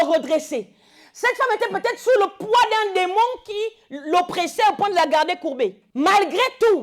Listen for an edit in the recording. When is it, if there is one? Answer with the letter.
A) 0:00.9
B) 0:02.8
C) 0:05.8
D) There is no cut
C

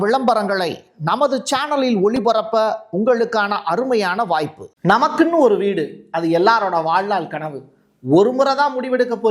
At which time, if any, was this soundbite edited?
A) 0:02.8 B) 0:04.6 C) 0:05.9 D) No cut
B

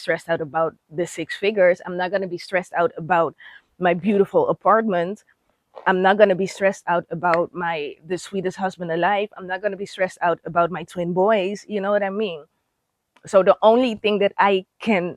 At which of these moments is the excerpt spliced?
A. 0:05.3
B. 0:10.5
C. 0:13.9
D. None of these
D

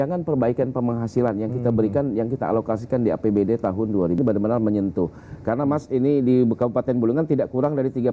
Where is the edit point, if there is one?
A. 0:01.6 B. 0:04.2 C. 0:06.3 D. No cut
B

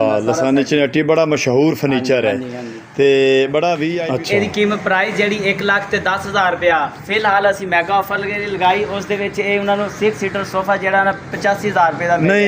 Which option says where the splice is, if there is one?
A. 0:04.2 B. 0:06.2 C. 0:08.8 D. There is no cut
A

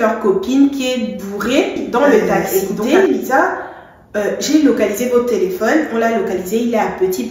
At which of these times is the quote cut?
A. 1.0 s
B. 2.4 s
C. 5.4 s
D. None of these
B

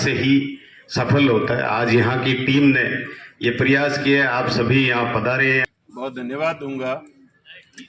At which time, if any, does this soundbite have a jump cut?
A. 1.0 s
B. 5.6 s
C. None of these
B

